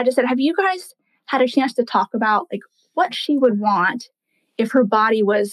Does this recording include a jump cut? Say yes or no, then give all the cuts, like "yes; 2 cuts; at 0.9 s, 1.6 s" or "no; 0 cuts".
no; 0 cuts